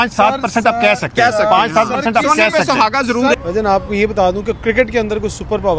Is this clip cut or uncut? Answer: cut